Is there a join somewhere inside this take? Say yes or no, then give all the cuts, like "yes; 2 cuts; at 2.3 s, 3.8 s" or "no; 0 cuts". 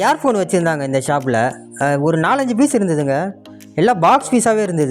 no; 0 cuts